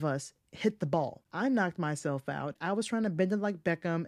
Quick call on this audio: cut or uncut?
cut